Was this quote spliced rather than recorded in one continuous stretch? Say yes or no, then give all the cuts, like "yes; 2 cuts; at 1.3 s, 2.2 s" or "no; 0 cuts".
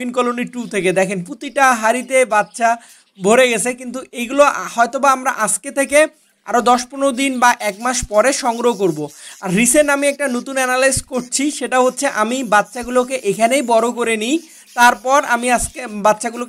no; 0 cuts